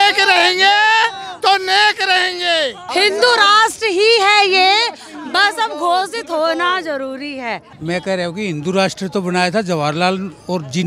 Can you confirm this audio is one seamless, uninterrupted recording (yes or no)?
no